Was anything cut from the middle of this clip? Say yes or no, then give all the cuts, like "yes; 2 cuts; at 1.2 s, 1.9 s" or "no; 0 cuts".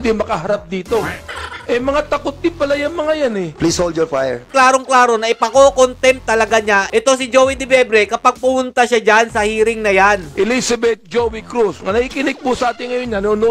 yes; 2 cuts; at 4.5 s, 10.3 s